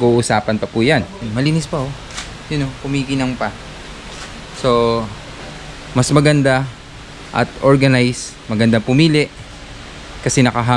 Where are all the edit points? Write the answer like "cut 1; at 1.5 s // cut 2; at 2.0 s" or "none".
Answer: cut 1; at 1.3 s